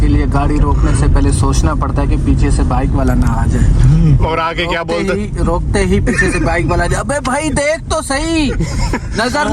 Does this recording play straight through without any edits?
yes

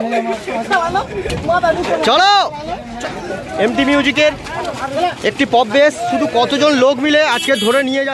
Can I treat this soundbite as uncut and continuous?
no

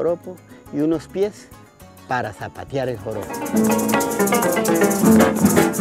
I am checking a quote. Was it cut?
yes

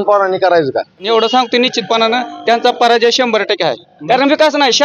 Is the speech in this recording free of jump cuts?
no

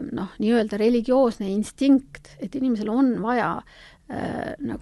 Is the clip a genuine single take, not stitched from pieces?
yes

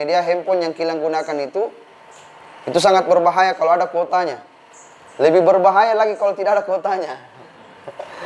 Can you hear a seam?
no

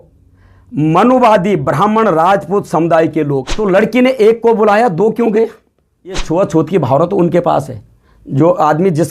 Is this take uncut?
no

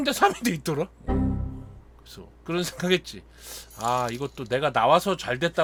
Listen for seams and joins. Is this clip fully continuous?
yes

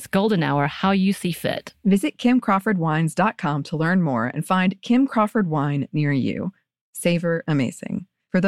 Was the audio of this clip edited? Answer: no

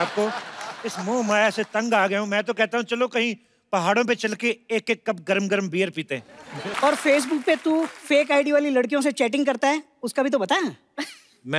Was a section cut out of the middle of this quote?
yes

